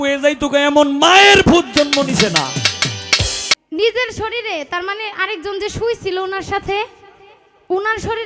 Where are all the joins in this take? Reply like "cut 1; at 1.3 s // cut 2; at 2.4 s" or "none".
cut 1; at 3.5 s